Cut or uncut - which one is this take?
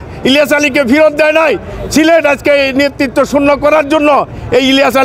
uncut